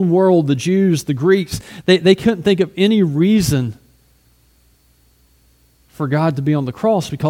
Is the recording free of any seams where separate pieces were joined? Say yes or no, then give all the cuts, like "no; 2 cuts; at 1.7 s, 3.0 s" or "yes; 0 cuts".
yes; 0 cuts